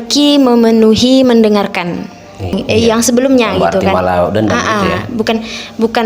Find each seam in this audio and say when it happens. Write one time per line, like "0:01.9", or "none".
0:02.6